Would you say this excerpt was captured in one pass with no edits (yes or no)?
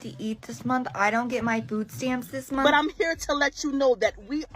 no